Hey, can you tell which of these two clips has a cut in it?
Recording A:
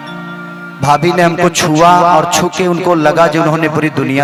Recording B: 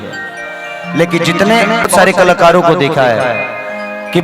B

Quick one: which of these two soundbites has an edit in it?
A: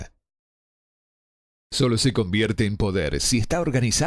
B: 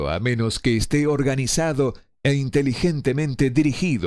A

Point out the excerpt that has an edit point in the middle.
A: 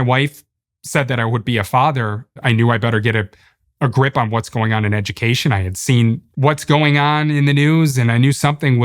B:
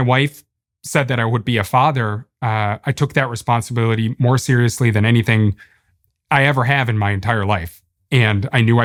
A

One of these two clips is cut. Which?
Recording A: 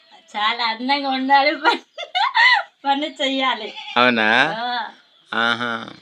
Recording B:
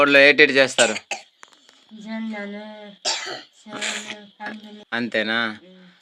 B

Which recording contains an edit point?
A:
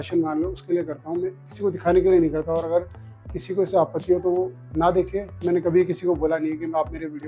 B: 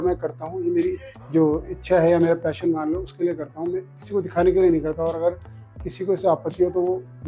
B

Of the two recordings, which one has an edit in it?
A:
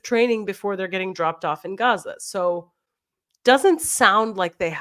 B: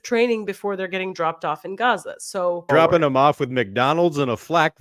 B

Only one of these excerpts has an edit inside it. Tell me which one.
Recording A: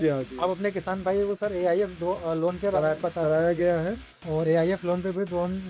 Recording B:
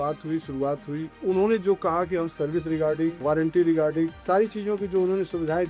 B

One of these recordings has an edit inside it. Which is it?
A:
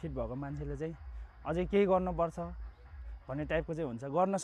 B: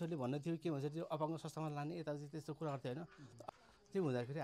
B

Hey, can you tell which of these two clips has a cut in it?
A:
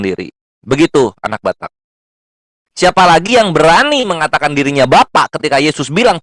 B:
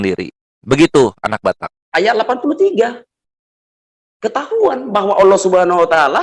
B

